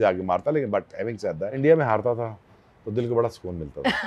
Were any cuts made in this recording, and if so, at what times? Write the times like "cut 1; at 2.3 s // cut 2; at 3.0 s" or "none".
cut 1; at 1.6 s